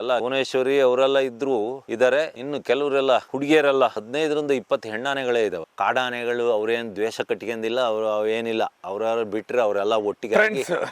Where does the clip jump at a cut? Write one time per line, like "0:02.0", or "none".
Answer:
0:04.0
0:05.6